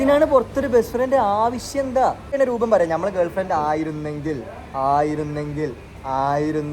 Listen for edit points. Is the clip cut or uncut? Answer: cut